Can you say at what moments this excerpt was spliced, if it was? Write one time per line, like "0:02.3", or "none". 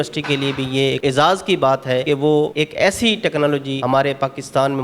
0:01.0
0:02.3
0:03.7

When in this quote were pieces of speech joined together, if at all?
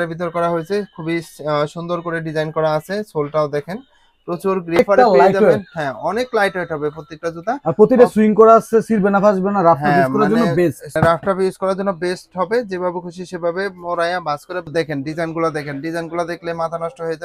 0:04.8
0:10.9
0:14.7

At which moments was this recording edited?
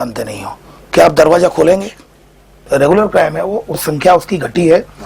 0:02.7
0:03.9

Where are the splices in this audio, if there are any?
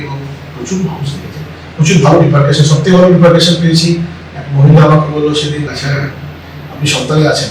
0:05.7

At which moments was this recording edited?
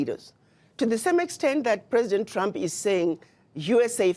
none

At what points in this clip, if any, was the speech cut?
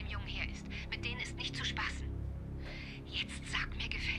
none

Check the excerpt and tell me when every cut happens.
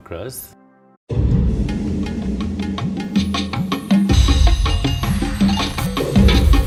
none

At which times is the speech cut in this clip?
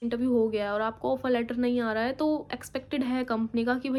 none

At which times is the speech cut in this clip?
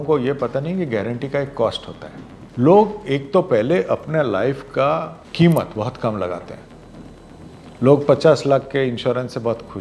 0:02.4
0:05.2

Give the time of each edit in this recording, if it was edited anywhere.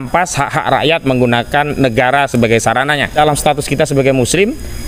0:03.1

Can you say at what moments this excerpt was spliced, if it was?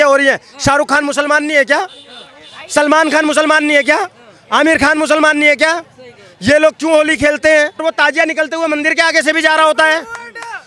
0:07.8

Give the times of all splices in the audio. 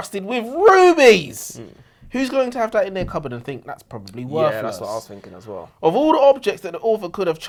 none

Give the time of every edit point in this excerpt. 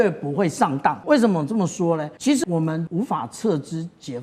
0:01.0
0:02.5

